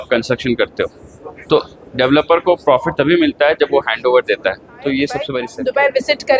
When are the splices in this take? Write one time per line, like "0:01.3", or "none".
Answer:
0:05.4